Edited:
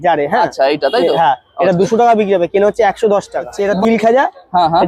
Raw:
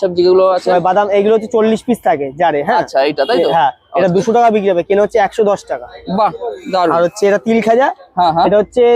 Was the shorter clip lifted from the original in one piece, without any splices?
no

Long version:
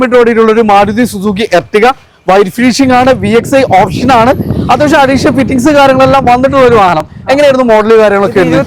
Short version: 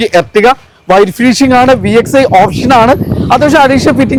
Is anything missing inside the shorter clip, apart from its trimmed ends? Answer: no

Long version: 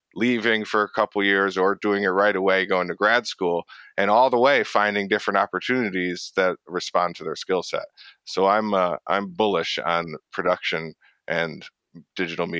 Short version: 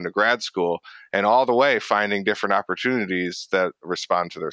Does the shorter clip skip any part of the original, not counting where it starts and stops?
no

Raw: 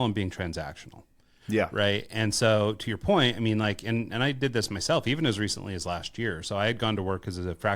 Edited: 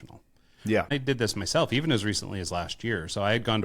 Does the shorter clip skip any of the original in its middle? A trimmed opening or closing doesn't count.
yes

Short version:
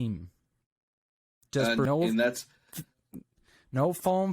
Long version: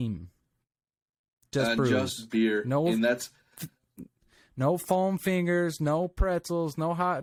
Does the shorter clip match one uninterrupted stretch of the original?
no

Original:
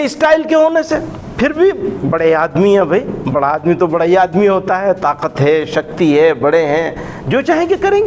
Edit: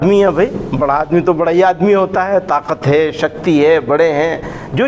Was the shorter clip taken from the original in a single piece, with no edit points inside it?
yes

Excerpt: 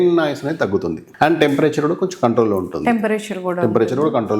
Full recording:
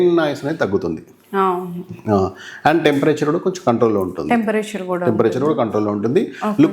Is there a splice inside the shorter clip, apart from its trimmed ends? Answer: yes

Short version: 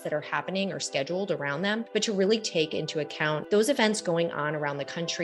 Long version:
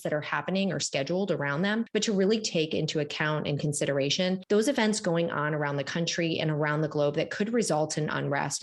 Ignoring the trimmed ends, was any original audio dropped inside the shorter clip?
yes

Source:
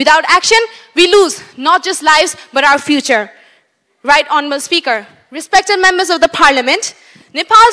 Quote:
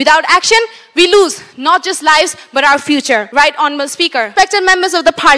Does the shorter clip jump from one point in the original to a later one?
yes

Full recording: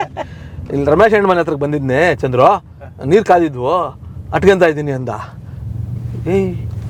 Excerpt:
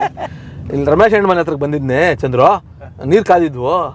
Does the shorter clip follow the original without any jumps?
yes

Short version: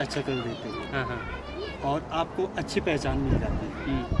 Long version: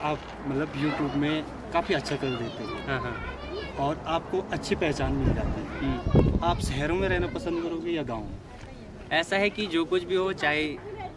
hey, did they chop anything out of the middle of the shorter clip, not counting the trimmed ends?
no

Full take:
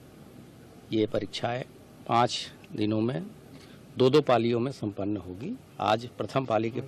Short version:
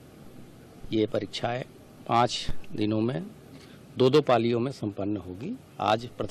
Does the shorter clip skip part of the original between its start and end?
no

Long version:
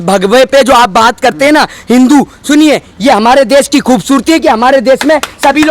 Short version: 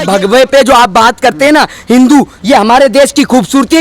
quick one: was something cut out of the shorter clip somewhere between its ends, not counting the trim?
yes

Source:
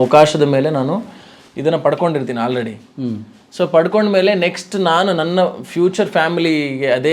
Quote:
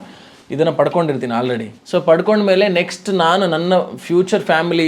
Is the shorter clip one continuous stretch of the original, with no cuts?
no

